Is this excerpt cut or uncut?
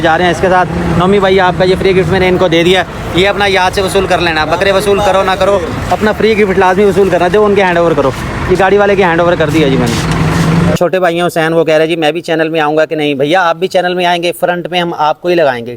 cut